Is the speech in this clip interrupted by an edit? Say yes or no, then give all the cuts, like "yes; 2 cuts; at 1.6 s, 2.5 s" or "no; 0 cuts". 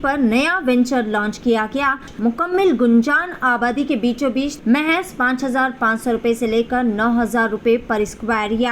yes; 2 cuts; at 2.1 s, 4.5 s